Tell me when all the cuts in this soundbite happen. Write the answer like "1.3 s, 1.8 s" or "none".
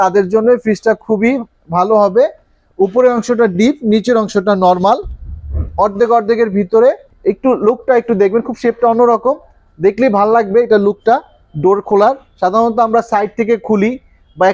7.1 s